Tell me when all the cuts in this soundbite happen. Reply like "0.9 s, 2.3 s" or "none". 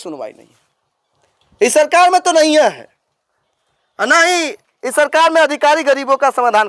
none